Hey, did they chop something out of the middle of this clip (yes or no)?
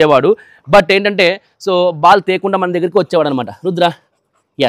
no